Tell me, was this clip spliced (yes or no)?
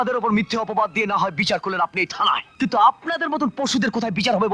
yes